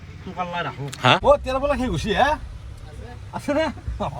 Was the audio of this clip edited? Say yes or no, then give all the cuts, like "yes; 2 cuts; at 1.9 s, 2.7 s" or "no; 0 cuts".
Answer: yes; 1 cut; at 1.2 s